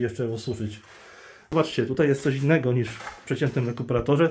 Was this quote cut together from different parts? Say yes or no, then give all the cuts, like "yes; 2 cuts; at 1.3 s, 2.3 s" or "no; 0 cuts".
yes; 1 cut; at 1.5 s